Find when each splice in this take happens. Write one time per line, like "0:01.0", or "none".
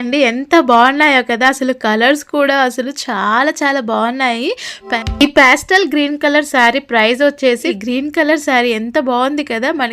0:04.9
0:07.8